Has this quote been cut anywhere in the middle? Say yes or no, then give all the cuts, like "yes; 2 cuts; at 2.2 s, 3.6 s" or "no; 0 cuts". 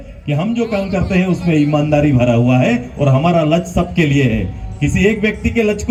no; 0 cuts